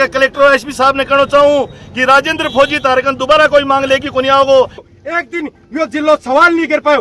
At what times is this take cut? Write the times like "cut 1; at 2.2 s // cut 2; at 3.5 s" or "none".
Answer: cut 1; at 4.9 s